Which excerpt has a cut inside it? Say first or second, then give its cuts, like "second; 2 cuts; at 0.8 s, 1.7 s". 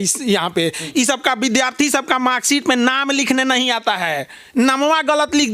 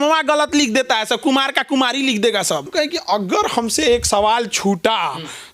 second; 1 cut; at 2.7 s